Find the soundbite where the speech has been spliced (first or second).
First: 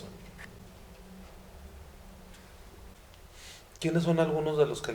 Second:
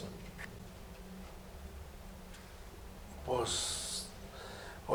first